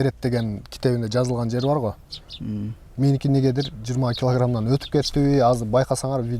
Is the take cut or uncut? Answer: uncut